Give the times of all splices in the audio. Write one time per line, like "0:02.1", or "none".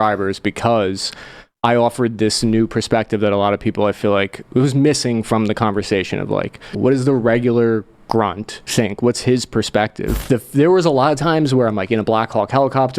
0:06.7
0:08.6
0:10.1